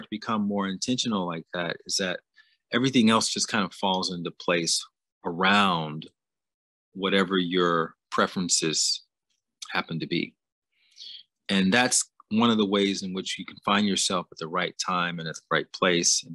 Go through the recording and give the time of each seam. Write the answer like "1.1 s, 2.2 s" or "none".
none